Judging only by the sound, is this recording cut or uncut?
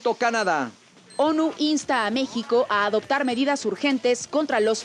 uncut